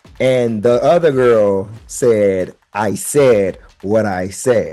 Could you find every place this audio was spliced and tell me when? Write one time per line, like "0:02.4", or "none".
none